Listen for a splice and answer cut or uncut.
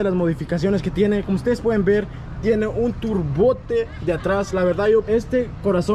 cut